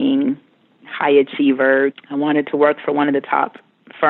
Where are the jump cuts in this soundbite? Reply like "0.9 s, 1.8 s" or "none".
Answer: 2.0 s